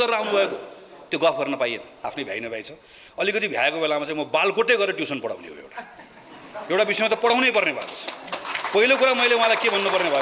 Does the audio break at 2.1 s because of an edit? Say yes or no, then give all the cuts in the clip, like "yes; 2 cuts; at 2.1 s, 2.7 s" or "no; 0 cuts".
yes; 1 cut; at 2.1 s